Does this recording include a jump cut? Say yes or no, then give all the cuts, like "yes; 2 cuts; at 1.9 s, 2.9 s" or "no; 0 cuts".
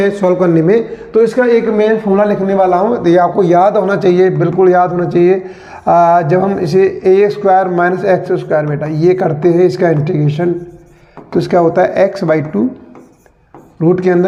no; 0 cuts